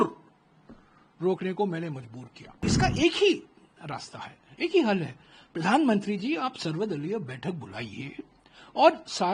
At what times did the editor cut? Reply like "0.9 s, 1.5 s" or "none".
2.6 s